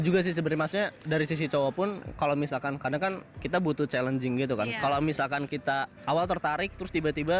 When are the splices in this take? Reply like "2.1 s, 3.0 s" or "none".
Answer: none